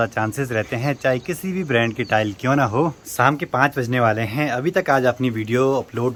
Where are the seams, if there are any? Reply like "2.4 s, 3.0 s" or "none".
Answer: none